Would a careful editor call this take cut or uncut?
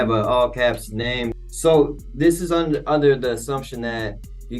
cut